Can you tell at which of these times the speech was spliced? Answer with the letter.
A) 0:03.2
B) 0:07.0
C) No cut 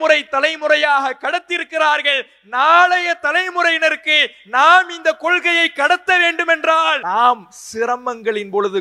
B